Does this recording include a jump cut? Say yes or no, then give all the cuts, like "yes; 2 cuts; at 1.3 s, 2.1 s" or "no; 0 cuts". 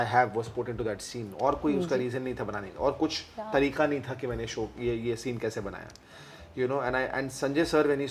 no; 0 cuts